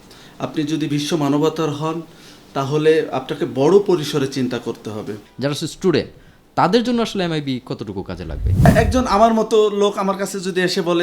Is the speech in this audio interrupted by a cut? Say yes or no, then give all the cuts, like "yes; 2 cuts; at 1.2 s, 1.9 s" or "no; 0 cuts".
yes; 2 cuts; at 5.2 s, 8.7 s